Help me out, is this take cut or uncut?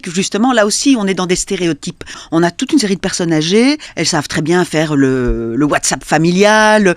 cut